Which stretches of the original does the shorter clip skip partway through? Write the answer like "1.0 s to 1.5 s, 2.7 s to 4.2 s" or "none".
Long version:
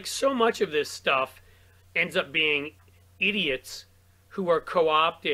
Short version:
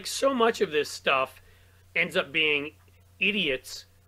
none